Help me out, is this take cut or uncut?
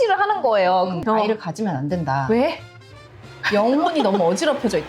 cut